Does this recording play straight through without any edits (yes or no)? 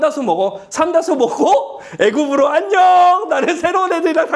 yes